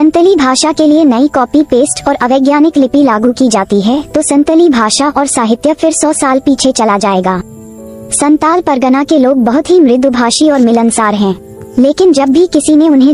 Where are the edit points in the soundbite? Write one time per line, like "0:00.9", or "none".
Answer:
none